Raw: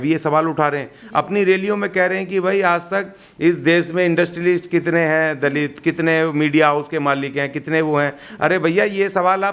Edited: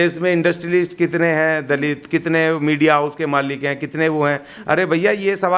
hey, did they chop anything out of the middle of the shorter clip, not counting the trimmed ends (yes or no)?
no